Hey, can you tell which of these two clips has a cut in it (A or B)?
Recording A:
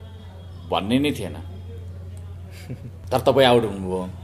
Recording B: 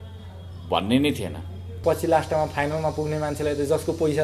B